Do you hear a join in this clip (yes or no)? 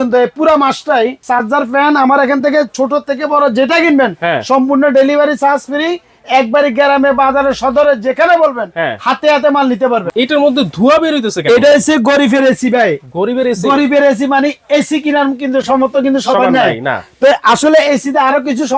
yes